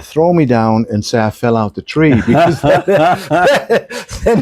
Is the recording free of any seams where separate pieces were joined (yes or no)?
yes